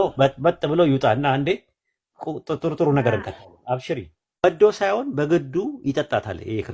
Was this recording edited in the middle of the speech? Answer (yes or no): yes